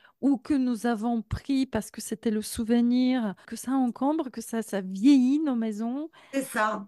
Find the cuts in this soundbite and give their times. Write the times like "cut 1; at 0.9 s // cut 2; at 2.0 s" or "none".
cut 1; at 3.5 s